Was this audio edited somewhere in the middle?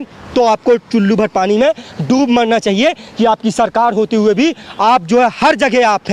no; 0 cuts

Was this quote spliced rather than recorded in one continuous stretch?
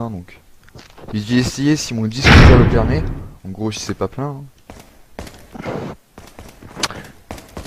no; 0 cuts

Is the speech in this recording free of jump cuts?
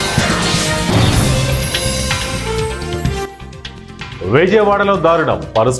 no; 1 cut; at 3.2 s

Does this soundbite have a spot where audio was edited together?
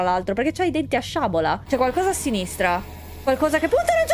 yes; 1 cut; at 1.6 s

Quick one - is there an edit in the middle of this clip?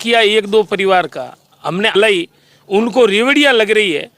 yes; 1 cut; at 1.9 s

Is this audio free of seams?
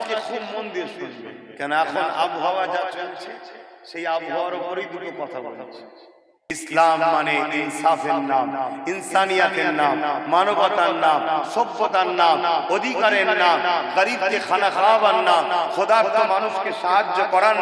no; 1 cut; at 6.6 s

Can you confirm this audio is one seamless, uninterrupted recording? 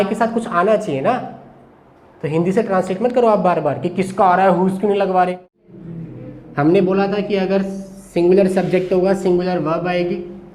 no; 1 cut; at 5.5 s

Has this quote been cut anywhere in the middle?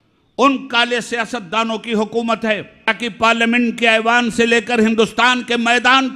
yes; 1 cut; at 2.9 s

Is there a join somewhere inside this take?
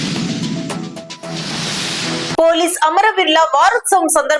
no; 0 cuts

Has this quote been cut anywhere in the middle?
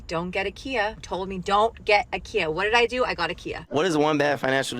yes; 1 cut; at 3.5 s

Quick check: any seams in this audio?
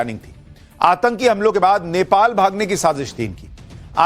yes; 1 cut; at 3.1 s

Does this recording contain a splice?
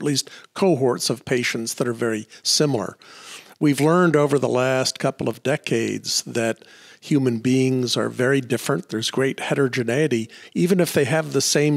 no; 0 cuts

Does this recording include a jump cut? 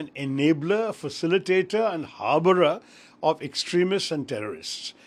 no; 0 cuts

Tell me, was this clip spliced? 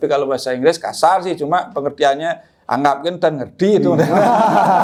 no; 0 cuts

